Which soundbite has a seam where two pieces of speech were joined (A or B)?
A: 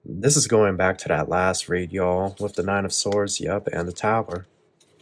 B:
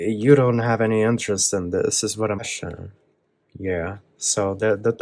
B